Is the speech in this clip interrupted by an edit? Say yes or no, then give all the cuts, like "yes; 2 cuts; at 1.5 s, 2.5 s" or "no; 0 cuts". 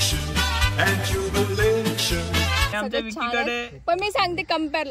yes; 1 cut; at 2.8 s